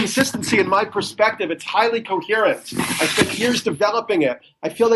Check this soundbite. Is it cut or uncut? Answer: uncut